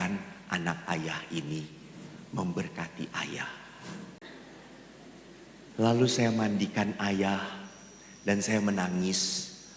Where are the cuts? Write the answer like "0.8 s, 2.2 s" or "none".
4.2 s